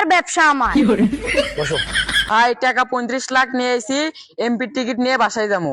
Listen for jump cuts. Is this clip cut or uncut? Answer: cut